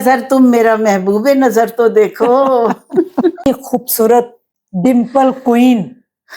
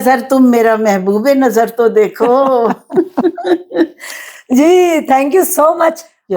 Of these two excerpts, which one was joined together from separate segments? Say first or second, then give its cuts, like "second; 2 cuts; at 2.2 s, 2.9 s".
first; 1 cut; at 3.5 s